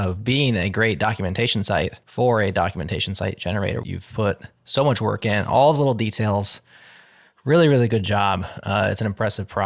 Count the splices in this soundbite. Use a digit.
2